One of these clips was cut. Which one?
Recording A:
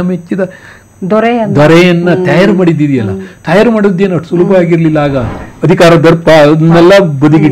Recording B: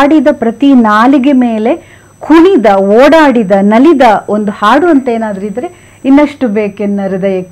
A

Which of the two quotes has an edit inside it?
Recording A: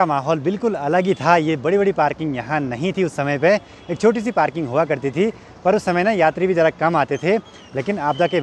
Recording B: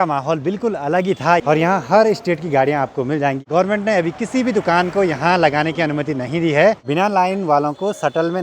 B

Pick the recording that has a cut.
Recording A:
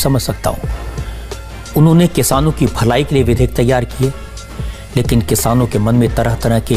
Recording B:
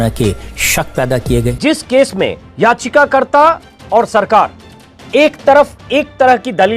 B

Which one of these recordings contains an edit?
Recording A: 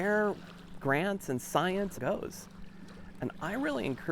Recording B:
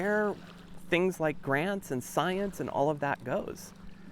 A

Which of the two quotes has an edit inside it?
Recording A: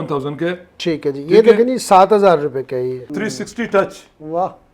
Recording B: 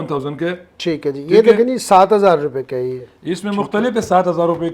A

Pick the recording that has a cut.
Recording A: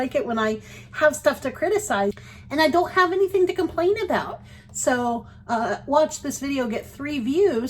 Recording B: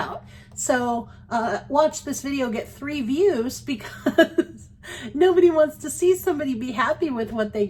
A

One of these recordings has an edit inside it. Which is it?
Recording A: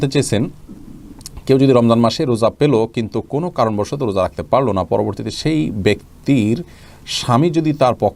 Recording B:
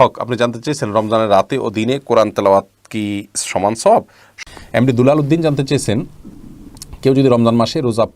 B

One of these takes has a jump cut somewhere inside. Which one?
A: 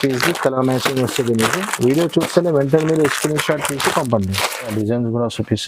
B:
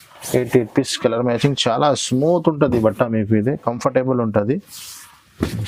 A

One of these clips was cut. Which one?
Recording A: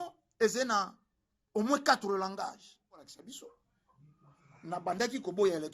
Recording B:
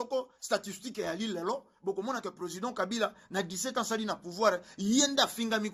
A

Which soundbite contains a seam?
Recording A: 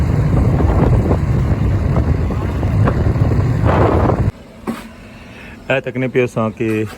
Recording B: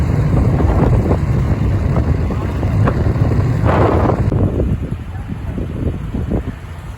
A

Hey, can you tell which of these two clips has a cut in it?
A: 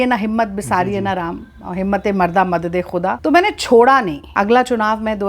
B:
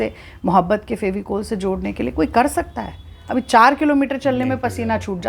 A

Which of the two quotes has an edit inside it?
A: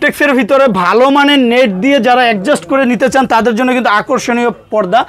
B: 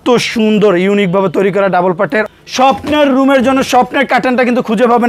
B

